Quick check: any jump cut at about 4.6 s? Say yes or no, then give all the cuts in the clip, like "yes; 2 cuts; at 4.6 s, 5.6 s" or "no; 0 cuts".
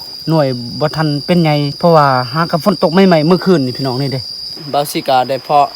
yes; 2 cuts; at 1.7 s, 4.6 s